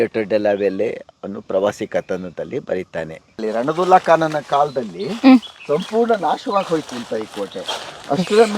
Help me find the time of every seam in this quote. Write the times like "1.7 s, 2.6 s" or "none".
3.4 s